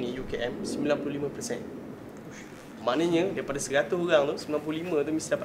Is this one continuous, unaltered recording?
yes; 0 cuts

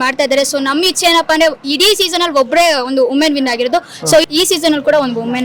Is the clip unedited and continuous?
no; 1 cut; at 4.3 s

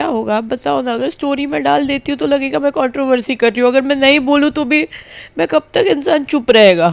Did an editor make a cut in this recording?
no; 0 cuts

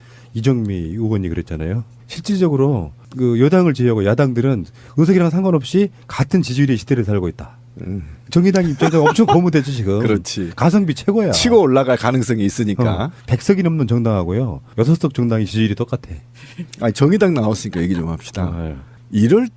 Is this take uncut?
no; 1 cut; at 1.9 s

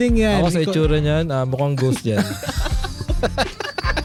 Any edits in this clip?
no; 0 cuts

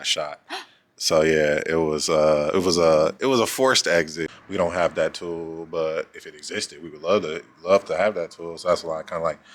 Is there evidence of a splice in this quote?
yes; 1 cut; at 4.3 s

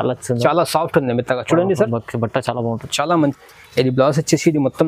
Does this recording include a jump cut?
yes; 1 cut; at 3.3 s

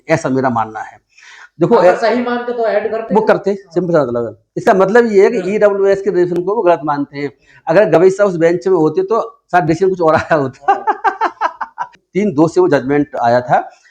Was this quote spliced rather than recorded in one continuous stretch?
yes; 1 cut; at 12.0 s

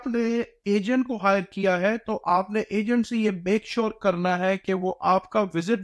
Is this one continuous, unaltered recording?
yes; 0 cuts

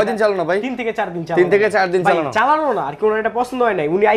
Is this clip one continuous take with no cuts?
yes; 0 cuts

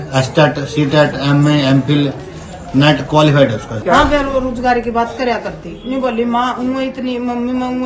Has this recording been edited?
yes; 1 cut; at 3.7 s

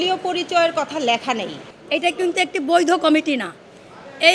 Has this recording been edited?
yes; 1 cut; at 1.7 s

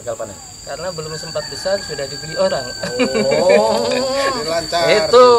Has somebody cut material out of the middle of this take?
no; 0 cuts

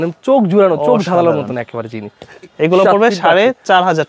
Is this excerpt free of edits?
yes; 0 cuts

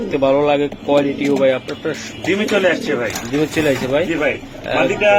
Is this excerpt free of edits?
yes; 0 cuts

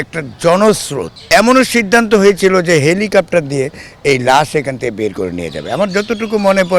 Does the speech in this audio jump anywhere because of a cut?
yes; 1 cut; at 1.1 s

